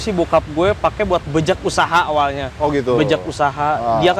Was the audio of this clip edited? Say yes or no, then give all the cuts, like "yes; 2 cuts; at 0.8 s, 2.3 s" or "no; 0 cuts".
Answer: no; 0 cuts